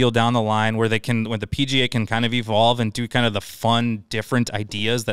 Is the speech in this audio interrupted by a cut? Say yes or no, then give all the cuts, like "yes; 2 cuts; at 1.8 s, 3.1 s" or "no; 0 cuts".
no; 0 cuts